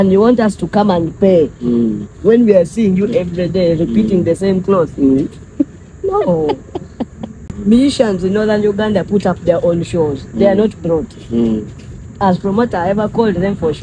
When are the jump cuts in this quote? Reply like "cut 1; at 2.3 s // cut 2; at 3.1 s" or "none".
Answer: cut 1; at 7.5 s